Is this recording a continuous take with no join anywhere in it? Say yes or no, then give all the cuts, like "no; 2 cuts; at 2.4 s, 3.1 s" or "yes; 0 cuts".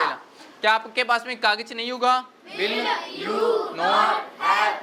yes; 0 cuts